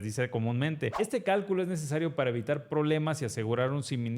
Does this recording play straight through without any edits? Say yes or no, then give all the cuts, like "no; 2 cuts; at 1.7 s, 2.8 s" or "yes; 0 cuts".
no; 1 cut; at 0.9 s